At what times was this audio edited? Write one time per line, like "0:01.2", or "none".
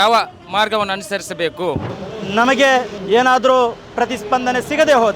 0:01.9
0:03.0

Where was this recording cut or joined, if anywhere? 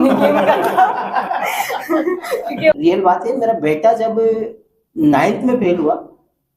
0:02.7

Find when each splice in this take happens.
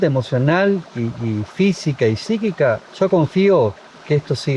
none

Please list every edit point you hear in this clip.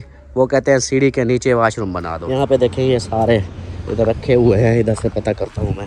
0:02.2

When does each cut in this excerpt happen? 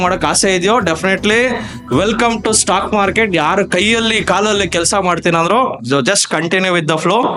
none

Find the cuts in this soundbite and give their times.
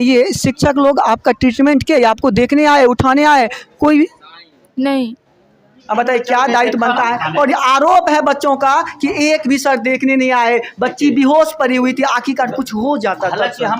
0:05.7

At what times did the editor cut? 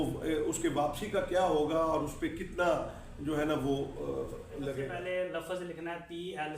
0:04.9

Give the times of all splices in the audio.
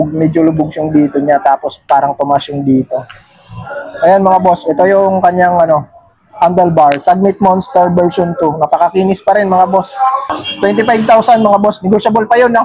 0:10.4

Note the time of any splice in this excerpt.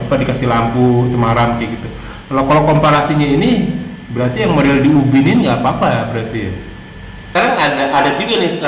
0:07.3

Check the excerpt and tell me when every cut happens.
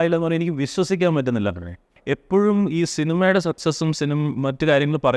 0:02.0

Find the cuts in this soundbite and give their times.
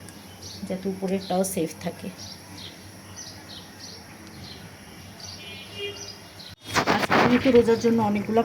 none

